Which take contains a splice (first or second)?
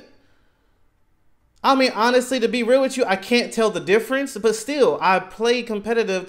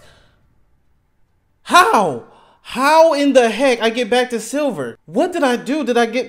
second